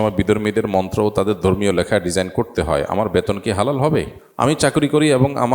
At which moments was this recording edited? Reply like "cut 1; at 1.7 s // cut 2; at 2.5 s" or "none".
cut 1; at 4.2 s